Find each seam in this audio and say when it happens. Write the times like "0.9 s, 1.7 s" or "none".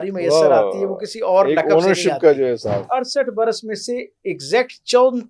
2.8 s